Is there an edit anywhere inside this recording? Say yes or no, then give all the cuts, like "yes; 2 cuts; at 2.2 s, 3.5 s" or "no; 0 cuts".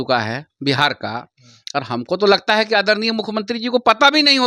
no; 0 cuts